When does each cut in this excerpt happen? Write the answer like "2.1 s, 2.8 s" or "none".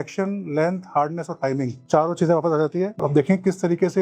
3.0 s